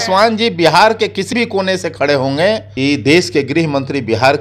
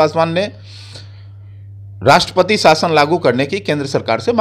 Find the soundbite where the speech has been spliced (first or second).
first